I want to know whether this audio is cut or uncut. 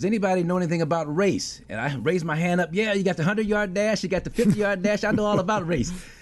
uncut